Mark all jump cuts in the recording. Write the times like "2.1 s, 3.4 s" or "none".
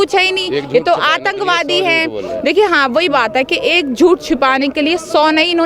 none